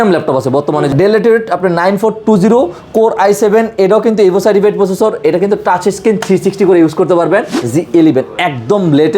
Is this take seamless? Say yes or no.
no